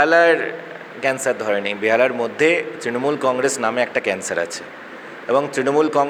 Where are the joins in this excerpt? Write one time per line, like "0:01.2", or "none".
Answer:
none